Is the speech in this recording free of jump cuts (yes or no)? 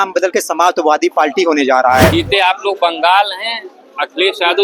no